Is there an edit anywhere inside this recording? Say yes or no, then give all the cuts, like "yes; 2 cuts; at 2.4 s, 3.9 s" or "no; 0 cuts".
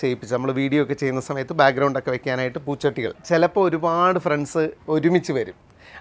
yes; 1 cut; at 3.2 s